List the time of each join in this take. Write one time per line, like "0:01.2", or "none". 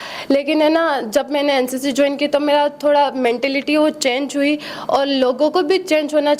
none